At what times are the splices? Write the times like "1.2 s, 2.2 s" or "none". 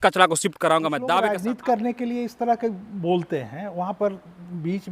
1.2 s

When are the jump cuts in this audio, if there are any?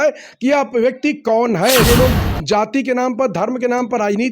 1.8 s

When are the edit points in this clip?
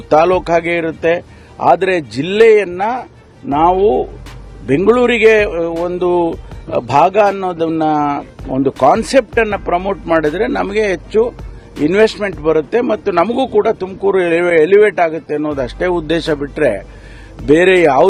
none

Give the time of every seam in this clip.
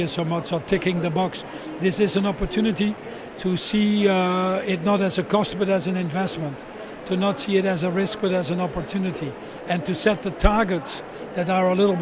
none

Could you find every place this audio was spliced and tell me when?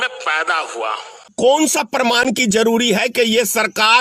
1.3 s

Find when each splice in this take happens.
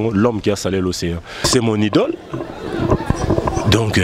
1.4 s

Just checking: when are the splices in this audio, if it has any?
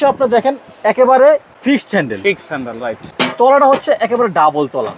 1.5 s, 3.1 s

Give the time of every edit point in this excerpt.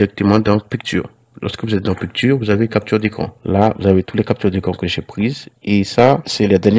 3.3 s

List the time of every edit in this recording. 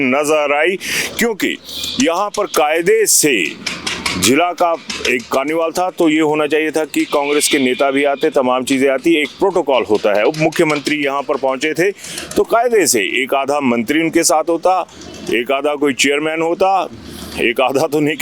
none

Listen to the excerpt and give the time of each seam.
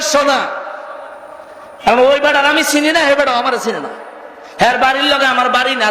none

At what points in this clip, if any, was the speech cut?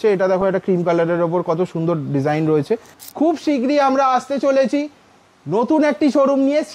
3.0 s

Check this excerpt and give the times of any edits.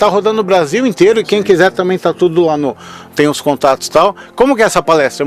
none

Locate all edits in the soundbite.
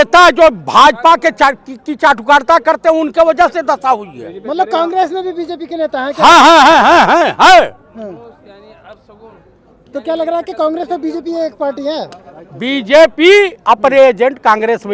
none

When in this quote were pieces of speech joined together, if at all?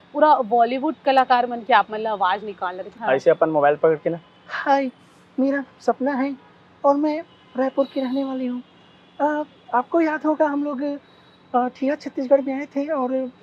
2.8 s

